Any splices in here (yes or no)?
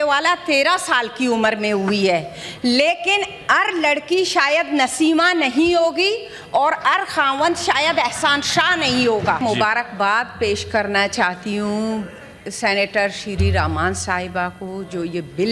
yes